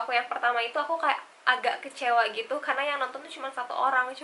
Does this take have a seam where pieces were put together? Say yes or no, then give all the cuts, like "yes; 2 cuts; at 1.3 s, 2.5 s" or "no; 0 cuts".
no; 0 cuts